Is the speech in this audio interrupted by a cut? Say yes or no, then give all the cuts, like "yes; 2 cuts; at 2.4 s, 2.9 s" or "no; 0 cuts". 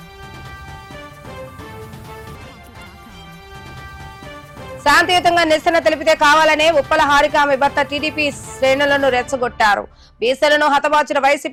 no; 0 cuts